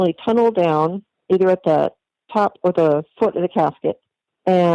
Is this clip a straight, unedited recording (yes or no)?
no